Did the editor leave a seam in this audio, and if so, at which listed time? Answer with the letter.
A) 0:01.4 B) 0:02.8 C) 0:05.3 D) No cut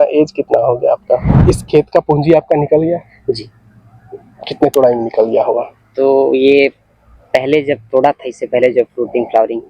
A